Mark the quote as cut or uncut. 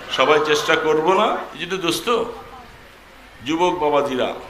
cut